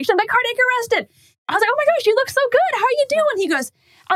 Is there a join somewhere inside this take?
yes; 1 cut; at 1.4 s

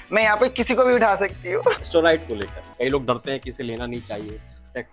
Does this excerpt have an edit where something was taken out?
yes; 2 cuts; at 1.8 s, 2.6 s

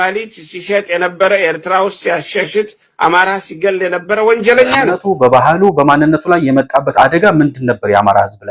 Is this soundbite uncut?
no; 1 cut; at 4.9 s

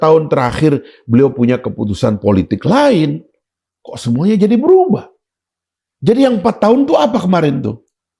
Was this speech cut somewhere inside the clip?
no; 0 cuts

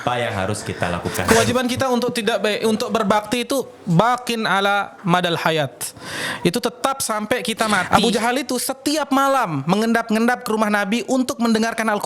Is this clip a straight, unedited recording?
no; 2 cuts; at 1.1 s, 7.8 s

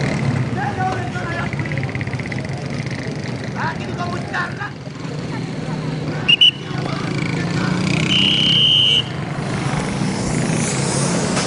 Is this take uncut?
yes; 0 cuts

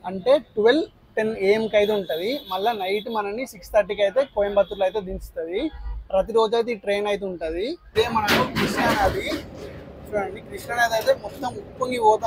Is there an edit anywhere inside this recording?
no; 0 cuts

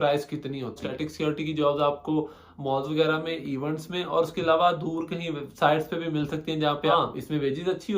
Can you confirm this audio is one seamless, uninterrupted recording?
no; 2 cuts; at 0.9 s, 6.9 s

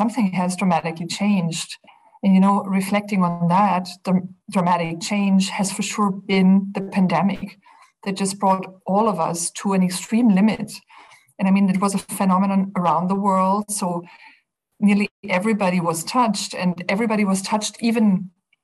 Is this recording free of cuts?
yes; 0 cuts

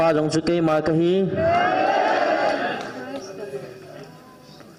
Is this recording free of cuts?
yes; 0 cuts

